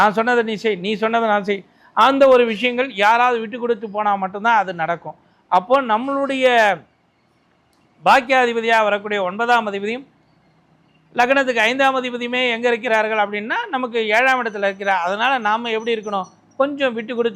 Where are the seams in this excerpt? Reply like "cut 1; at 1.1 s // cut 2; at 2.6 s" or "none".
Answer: none